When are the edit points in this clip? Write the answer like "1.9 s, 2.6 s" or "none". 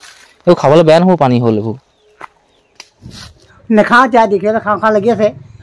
3.5 s